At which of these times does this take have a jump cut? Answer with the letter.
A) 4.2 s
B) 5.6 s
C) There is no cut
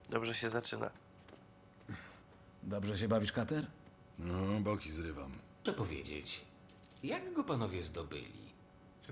B